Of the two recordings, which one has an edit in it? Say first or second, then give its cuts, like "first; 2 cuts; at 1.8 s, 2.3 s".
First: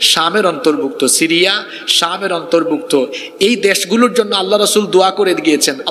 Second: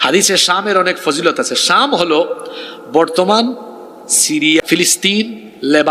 second; 1 cut; at 4.6 s